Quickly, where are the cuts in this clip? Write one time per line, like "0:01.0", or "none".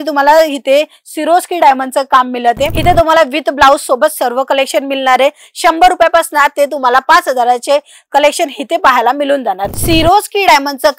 0:02.8
0:09.7